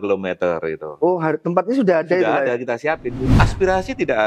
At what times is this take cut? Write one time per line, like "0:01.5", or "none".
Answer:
0:03.2